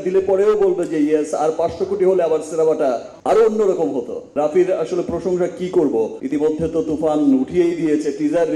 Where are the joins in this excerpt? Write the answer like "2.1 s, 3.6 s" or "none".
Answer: none